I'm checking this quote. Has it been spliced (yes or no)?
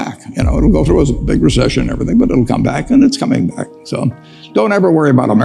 no